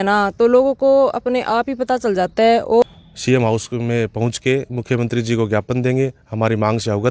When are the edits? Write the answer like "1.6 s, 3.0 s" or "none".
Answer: 2.8 s